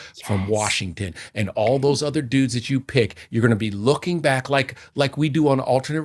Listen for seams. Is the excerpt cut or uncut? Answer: uncut